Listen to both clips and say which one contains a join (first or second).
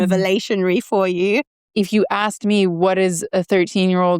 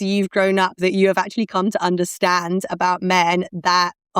first